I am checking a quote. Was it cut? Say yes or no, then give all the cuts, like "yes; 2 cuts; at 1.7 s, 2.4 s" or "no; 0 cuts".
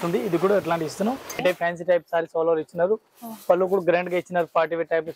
yes; 1 cut; at 1.4 s